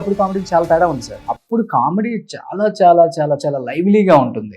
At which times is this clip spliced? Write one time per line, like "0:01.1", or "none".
0:01.1